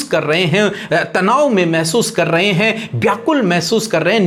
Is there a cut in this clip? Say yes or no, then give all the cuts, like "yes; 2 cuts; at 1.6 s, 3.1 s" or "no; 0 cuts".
no; 0 cuts